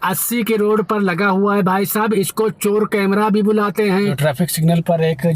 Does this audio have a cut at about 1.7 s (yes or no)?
no